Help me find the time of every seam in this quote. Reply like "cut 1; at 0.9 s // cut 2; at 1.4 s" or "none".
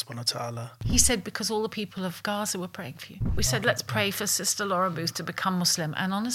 cut 1; at 0.8 s // cut 2; at 3.3 s